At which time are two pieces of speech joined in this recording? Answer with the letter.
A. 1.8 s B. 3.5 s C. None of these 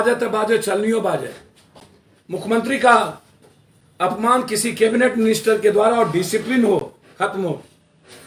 C